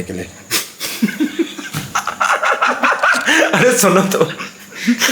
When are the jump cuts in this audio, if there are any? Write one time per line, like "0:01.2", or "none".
none